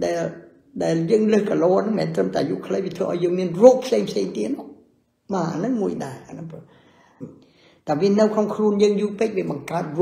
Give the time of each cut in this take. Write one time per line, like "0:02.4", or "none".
0:07.2

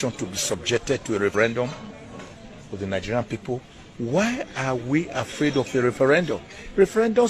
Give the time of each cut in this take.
0:01.3

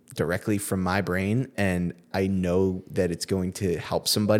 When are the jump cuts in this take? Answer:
none

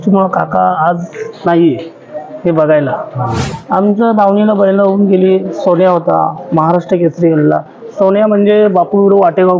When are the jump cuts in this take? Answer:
0:03.5

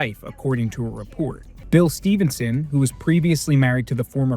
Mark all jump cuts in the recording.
0:01.5

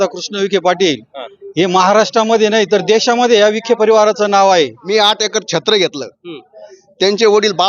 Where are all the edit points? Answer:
0:04.8

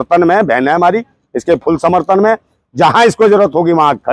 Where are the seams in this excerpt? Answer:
none

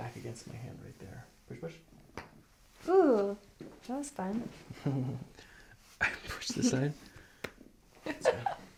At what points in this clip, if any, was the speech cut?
none

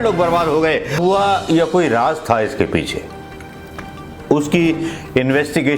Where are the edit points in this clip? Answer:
0:01.0

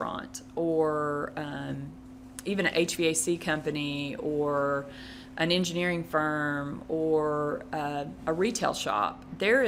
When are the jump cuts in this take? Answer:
none

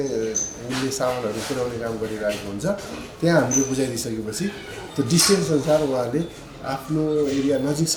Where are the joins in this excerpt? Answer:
none

